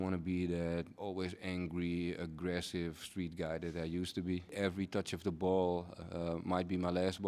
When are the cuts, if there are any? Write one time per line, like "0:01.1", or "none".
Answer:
0:00.9
0:04.5